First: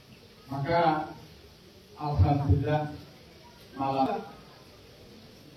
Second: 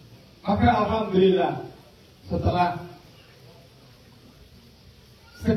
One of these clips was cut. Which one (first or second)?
first